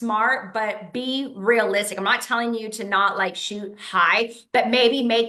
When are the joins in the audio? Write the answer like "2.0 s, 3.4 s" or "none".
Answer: none